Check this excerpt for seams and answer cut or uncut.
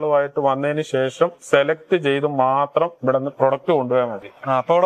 uncut